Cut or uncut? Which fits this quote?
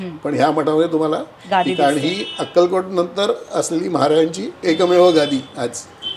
uncut